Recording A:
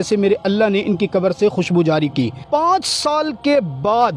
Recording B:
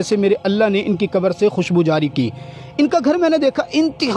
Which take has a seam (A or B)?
A